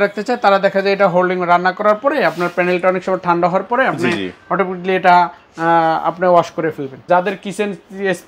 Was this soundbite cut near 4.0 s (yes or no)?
no